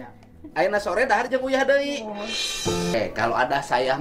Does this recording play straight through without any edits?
no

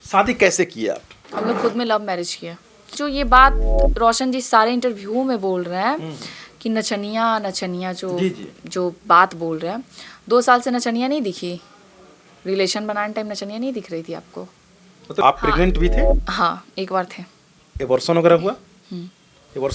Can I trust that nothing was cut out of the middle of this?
no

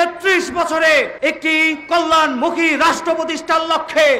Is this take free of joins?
no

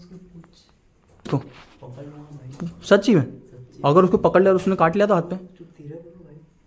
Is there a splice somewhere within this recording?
yes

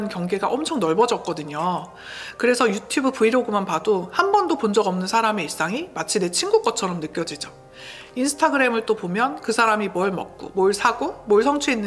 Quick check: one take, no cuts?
yes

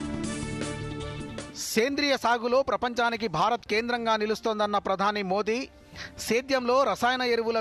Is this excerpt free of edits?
yes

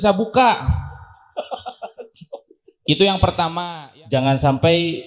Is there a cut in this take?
yes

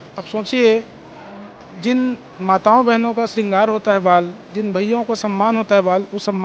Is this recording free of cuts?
yes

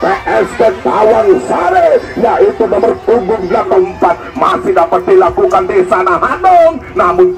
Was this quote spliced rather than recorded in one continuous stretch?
yes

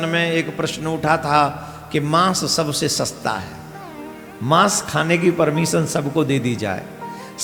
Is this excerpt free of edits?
yes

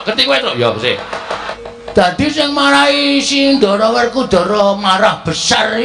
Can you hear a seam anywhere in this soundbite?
yes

